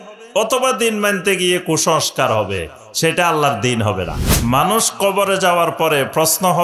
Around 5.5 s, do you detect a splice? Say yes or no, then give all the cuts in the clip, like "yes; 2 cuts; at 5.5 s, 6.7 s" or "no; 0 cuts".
no; 1 cut; at 4.2 s